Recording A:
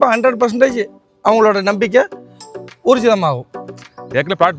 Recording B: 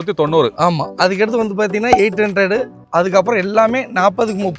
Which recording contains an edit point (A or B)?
A